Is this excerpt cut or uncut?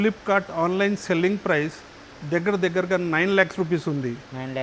uncut